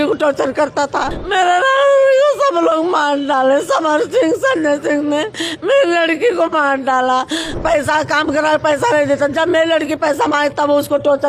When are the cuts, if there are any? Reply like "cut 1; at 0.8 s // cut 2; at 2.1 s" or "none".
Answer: cut 1; at 1.2 s // cut 2; at 7.5 s